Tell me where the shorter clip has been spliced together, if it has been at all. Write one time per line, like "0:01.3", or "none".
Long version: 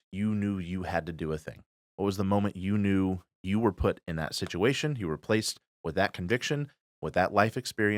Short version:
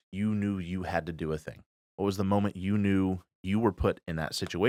none